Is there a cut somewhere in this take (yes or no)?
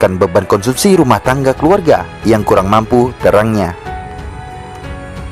yes